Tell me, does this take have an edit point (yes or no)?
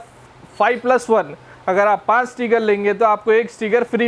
no